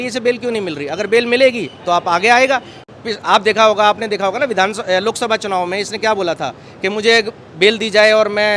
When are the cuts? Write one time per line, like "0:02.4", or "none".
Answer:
none